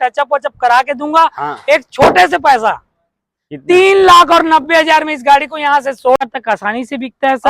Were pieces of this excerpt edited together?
yes; 1 cut; at 6.2 s

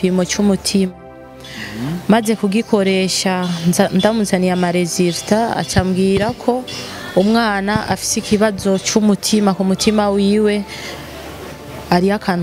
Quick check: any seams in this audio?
no; 0 cuts

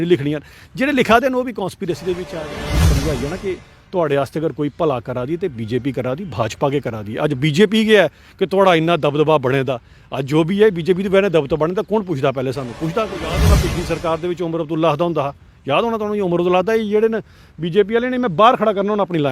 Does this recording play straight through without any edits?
no; 2 cuts; at 2.7 s, 13.4 s

